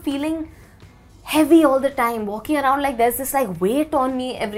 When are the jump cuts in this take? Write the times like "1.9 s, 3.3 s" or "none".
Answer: none